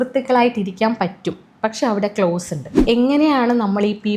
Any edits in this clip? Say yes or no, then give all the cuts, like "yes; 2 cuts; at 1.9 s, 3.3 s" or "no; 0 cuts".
yes; 1 cut; at 2.8 s